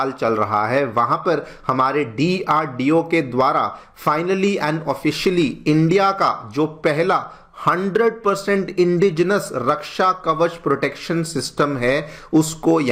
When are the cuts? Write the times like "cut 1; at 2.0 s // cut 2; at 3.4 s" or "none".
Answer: none